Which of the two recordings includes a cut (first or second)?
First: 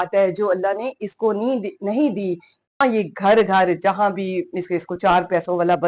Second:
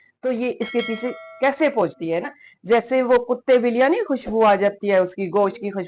first